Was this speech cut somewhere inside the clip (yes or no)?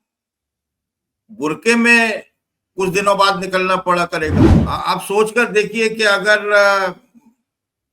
yes